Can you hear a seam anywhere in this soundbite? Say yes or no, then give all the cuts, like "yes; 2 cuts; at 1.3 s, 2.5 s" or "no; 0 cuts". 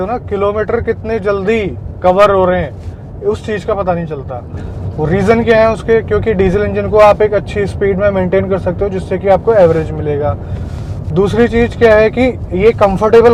no; 0 cuts